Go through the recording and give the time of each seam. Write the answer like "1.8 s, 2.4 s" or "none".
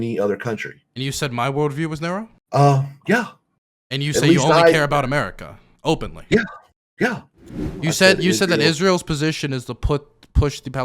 2.4 s, 7.8 s